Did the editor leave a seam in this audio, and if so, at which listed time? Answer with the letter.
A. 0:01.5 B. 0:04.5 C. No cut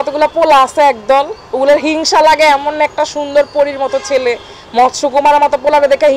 C